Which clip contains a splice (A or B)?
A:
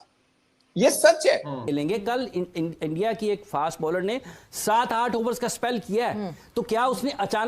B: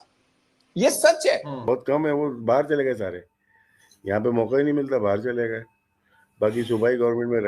A